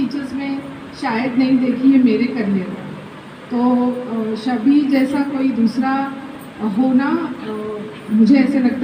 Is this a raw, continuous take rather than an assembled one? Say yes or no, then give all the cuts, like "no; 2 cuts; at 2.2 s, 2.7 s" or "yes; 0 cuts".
yes; 0 cuts